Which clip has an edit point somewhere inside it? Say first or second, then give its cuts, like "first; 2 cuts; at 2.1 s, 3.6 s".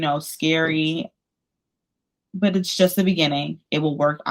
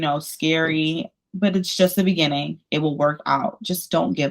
second; 1 cut; at 1.2 s